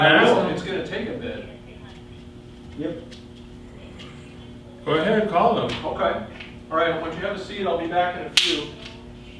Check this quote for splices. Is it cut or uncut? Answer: uncut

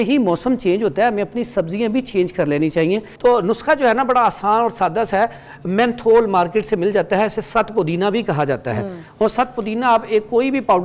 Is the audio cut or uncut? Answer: cut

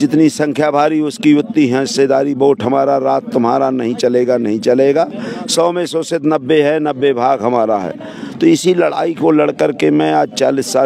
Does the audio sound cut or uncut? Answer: uncut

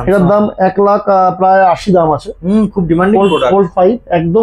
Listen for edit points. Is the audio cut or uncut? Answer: uncut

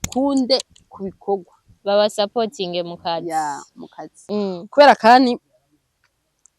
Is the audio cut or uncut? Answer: cut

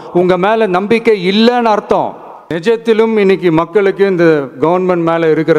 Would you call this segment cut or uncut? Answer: cut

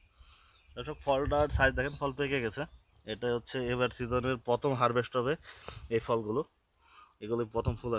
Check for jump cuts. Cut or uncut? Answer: uncut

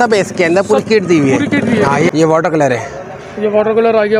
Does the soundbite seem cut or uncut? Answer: cut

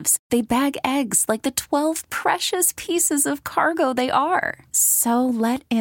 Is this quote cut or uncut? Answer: uncut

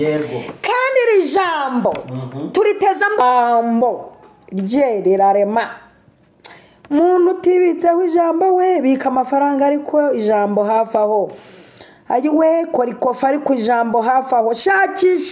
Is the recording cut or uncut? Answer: cut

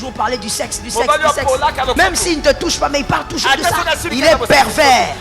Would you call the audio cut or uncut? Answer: cut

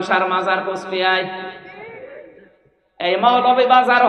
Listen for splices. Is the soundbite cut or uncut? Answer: uncut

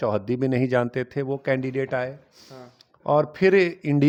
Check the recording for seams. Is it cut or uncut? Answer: uncut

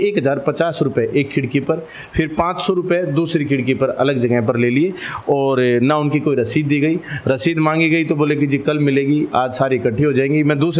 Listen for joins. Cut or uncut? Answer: uncut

